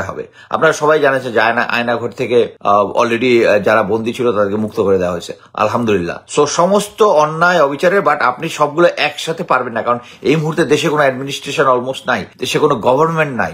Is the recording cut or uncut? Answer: cut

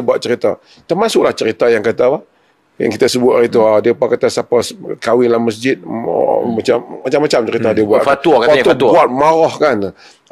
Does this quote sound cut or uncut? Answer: uncut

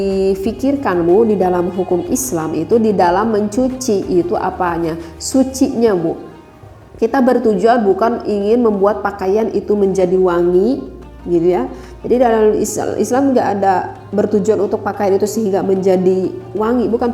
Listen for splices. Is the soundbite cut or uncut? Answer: uncut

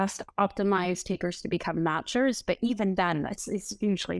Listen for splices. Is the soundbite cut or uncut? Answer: uncut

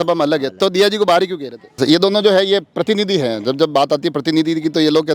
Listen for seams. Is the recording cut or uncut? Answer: cut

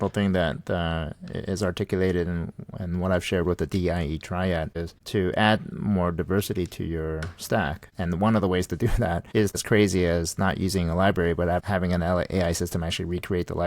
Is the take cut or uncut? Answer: cut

